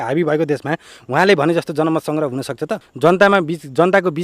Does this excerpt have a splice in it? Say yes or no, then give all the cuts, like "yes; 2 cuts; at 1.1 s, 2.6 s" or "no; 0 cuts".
yes; 1 cut; at 2.8 s